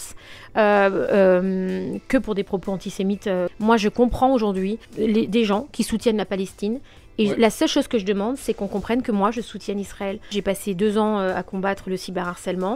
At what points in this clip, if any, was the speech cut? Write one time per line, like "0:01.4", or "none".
0:03.5
0:04.9
0:10.3